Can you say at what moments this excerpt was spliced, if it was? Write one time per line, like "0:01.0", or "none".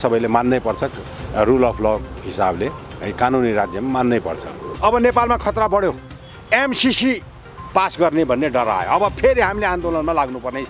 0:04.6